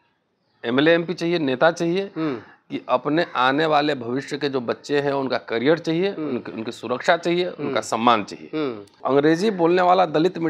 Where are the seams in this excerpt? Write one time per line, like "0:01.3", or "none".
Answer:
0:08.9